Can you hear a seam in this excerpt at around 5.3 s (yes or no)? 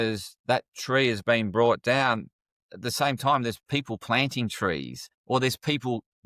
no